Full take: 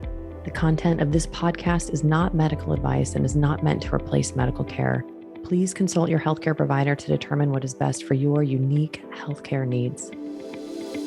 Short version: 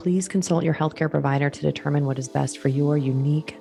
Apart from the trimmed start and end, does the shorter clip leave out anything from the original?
no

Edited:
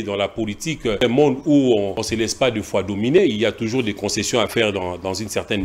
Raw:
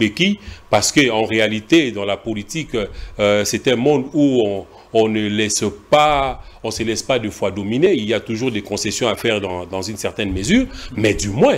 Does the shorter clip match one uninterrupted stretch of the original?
no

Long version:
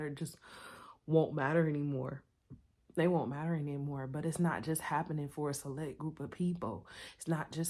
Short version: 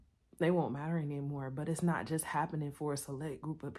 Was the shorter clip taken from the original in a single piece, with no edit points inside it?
yes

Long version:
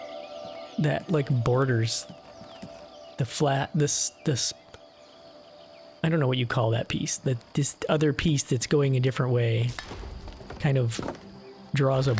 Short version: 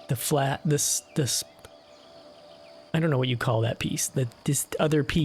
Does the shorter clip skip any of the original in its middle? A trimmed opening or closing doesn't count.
no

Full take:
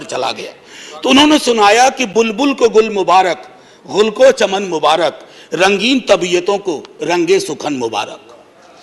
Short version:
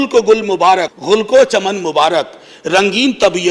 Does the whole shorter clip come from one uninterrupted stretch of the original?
no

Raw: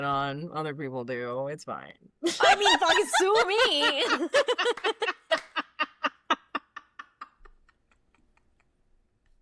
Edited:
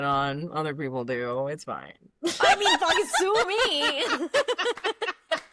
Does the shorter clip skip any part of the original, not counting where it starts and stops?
no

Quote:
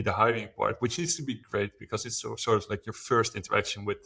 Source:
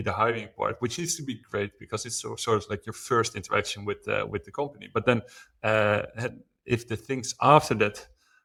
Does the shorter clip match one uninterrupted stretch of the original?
yes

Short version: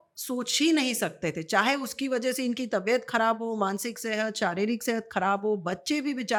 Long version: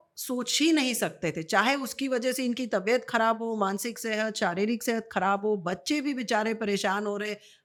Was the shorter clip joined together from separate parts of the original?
no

